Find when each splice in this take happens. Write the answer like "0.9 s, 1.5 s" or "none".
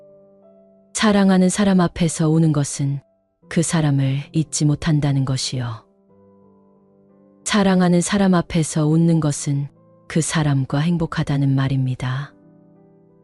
none